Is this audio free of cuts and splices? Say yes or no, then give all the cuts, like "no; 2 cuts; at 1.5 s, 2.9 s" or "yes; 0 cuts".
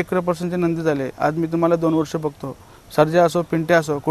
yes; 0 cuts